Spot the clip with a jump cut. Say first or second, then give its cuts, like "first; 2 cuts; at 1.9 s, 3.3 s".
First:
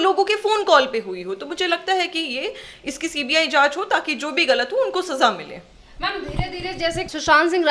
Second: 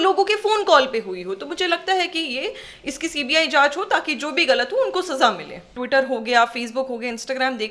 second; 1 cut; at 5.8 s